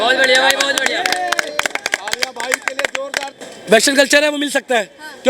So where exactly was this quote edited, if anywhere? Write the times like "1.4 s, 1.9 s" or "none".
3.4 s

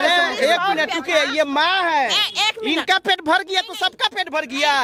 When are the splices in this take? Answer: none

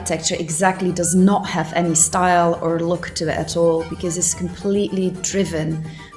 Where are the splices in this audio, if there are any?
none

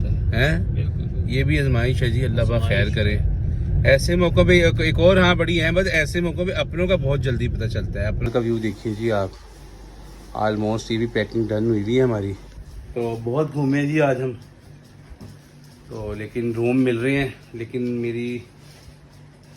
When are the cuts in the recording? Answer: 8.3 s

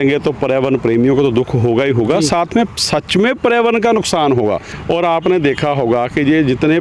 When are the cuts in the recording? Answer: 4.7 s

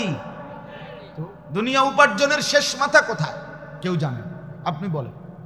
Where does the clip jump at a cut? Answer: 1.4 s

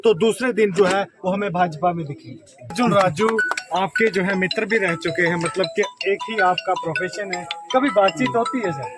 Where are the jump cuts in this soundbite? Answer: 2.7 s

